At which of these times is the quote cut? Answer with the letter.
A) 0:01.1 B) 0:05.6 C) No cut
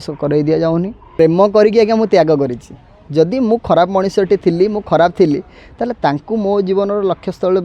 A